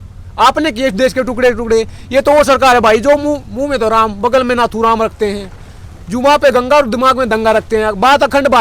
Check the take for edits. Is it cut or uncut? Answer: uncut